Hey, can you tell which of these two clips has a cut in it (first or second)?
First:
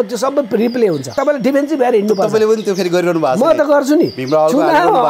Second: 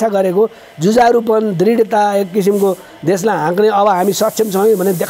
first